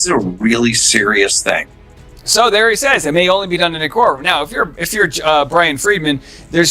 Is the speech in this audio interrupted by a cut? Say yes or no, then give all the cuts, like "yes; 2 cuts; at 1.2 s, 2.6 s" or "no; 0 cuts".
yes; 1 cut; at 1.7 s